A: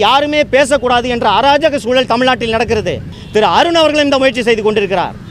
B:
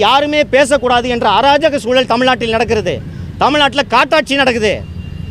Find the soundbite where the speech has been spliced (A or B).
A